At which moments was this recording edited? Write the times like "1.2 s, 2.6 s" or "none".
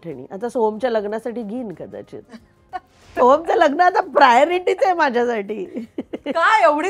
3.1 s